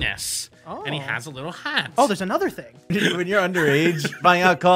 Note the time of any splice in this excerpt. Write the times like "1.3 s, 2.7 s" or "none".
2.9 s